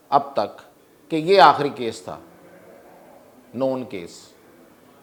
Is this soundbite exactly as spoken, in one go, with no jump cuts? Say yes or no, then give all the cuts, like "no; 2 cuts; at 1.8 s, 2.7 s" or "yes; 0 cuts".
yes; 0 cuts